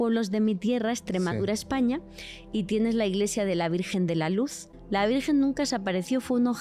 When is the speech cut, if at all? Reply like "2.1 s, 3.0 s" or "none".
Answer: 4.7 s